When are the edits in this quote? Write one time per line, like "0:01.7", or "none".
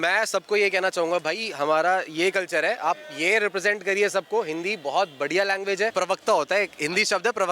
0:05.9